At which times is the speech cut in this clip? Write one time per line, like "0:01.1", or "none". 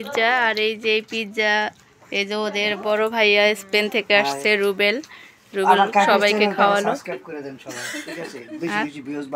0:08.1